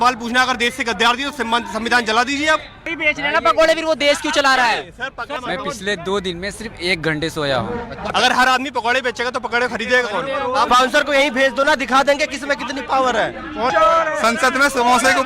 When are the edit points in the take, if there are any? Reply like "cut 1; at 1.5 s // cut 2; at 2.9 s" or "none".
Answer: cut 1; at 3.0 s // cut 2; at 5.3 s // cut 3; at 8.1 s // cut 4; at 10.7 s // cut 5; at 13.7 s